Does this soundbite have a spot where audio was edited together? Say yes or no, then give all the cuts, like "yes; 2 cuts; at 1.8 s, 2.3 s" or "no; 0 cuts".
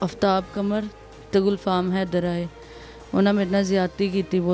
no; 0 cuts